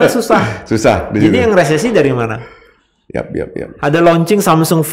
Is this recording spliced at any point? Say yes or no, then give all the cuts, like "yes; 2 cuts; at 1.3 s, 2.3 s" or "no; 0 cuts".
no; 0 cuts